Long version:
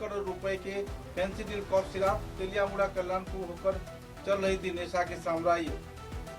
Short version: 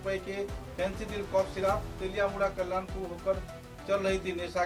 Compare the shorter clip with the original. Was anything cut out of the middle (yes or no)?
no